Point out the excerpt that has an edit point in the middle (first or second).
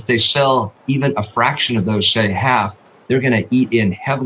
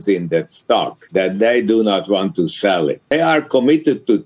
second